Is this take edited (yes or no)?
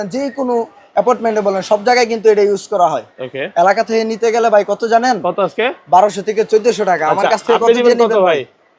no